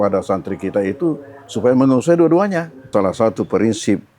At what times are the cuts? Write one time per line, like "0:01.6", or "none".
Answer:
0:02.9